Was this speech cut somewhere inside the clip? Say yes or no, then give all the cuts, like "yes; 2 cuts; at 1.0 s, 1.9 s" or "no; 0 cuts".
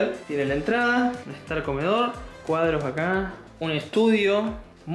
yes; 3 cuts; at 1.3 s, 2.4 s, 3.4 s